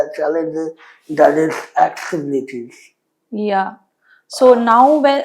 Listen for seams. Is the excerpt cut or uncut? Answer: uncut